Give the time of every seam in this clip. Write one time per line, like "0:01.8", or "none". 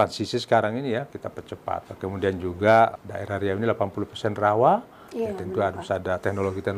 0:01.9
0:03.0